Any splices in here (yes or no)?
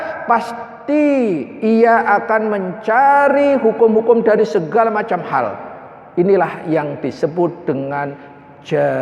no